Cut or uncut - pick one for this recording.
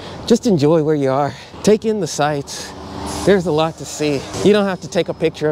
cut